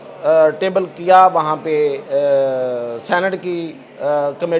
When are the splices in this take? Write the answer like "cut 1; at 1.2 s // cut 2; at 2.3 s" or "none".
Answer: none

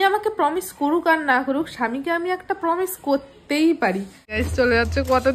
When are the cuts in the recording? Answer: cut 1; at 4.4 s

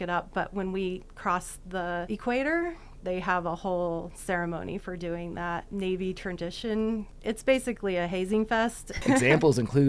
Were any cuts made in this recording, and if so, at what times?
cut 1; at 2.1 s // cut 2; at 5.7 s // cut 3; at 7.1 s // cut 4; at 9.0 s

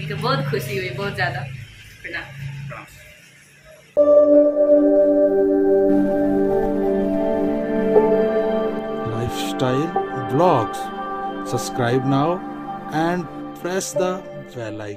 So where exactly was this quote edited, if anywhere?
none

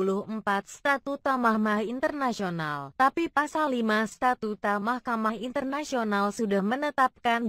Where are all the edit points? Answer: cut 1; at 1.0 s

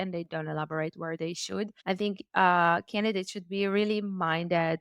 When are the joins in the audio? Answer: cut 1; at 1.8 s

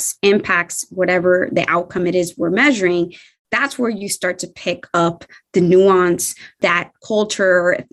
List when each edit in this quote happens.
none

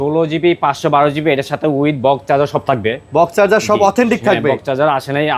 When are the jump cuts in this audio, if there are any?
none

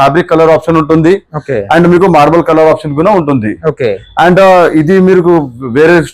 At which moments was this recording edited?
none

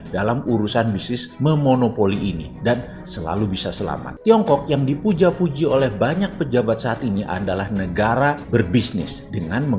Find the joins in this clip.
cut 1; at 4.1 s

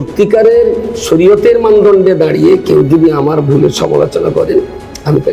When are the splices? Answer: none

